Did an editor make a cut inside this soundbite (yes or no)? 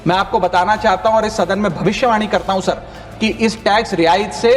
no